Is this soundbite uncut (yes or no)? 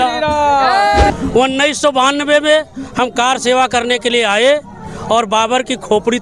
no